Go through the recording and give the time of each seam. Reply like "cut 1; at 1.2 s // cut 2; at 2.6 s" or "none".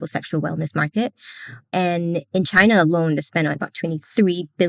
cut 1; at 3.6 s